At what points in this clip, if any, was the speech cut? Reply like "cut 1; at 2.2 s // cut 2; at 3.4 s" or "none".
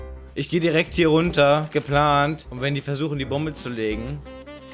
cut 1; at 2.5 s